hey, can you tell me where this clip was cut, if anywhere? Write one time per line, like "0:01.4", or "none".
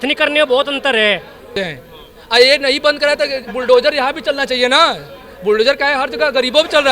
0:01.6